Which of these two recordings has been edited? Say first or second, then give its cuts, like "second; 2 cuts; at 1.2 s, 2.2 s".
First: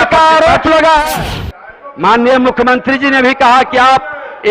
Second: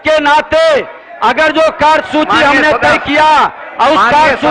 first; 1 cut; at 1.3 s